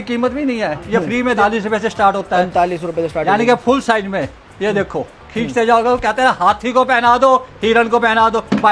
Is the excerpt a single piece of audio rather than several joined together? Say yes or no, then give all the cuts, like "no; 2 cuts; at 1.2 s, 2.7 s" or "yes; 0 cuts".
no; 1 cut; at 1.4 s